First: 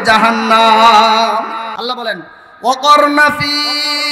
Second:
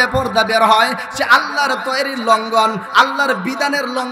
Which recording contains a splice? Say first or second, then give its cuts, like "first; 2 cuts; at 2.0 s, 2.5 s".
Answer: first; 1 cut; at 1.7 s